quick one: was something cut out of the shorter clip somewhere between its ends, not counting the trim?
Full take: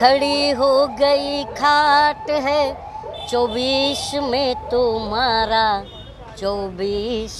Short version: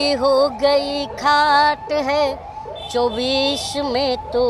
no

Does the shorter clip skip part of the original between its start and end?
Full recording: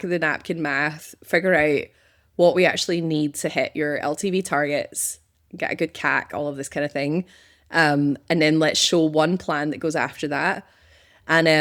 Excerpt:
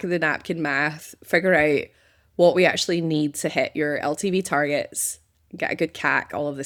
no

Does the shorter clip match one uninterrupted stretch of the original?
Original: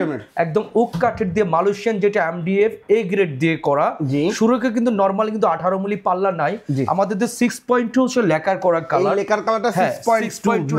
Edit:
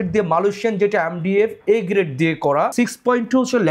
no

